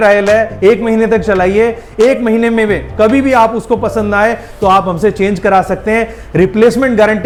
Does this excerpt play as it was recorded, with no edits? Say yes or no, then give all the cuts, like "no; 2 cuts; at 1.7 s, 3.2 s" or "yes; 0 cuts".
yes; 0 cuts